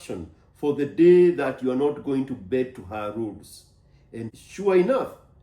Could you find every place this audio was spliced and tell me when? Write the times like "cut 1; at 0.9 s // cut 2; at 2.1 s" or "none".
cut 1; at 4.3 s